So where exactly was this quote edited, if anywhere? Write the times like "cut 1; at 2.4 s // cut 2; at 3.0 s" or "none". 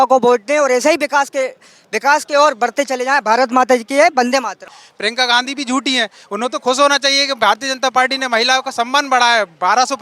cut 1; at 4.6 s